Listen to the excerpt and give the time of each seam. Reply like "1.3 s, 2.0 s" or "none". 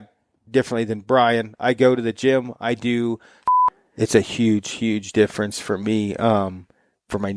3.3 s